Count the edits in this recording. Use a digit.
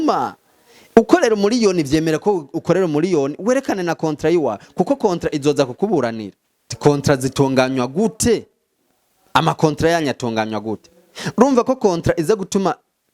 1